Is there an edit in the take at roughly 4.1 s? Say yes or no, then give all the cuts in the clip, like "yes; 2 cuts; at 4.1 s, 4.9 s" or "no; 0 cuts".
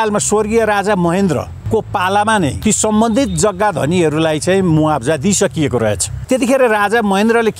no; 3 cuts; at 1.5 s, 2.6 s, 6.2 s